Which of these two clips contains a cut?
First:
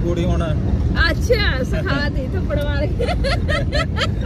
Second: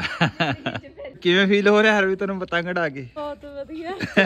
second; 2 cuts; at 1.2 s, 3.2 s

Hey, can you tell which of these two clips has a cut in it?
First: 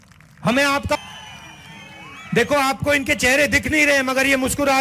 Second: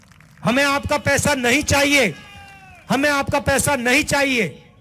first; 1 cut; at 1.0 s

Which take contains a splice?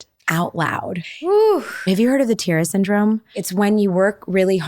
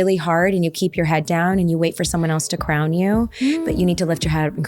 first; 3 cuts; at 1.1 s, 1.8 s, 3.4 s

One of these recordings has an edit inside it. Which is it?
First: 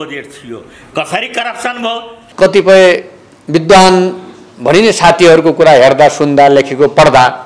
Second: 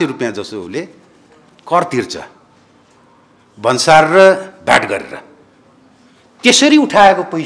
first; 1 cut; at 2.2 s

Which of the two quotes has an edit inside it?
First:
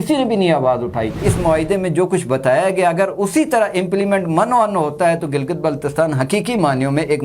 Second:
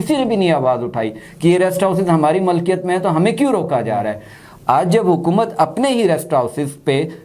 first; 1 cut; at 1.3 s

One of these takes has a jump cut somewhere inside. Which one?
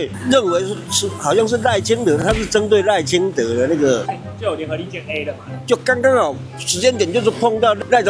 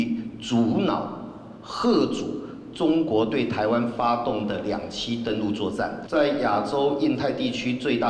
second; 1 cut; at 6.0 s

